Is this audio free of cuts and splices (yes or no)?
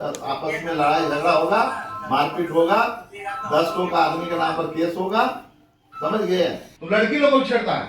no